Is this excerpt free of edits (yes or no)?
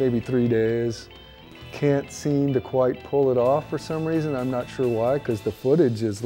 yes